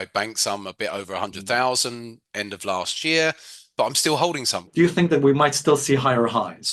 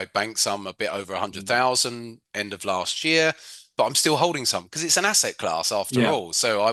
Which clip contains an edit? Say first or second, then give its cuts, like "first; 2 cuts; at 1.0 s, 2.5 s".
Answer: first; 1 cut; at 4.7 s